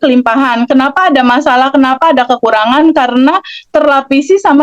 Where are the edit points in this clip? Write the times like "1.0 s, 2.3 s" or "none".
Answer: none